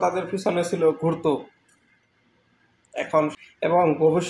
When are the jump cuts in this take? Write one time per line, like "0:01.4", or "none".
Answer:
0:03.3